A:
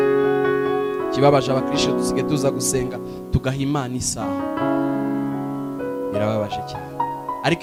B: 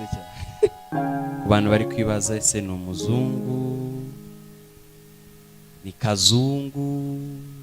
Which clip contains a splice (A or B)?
B